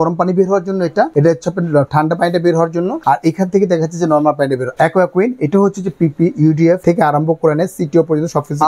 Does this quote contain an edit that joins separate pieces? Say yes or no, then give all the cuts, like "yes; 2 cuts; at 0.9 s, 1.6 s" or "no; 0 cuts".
yes; 4 cuts; at 1.1 s, 3.0 s, 4.7 s, 6.8 s